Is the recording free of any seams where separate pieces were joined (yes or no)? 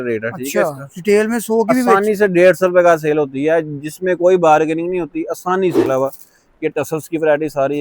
no